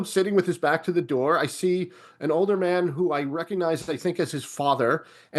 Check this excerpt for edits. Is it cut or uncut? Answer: uncut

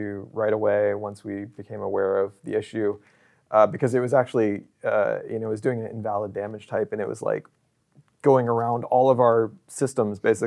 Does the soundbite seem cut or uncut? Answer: uncut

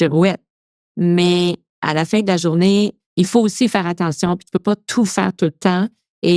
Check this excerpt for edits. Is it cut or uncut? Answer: cut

